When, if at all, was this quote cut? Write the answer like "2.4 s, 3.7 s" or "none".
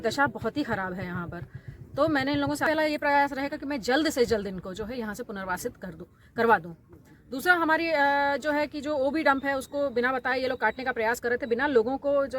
2.6 s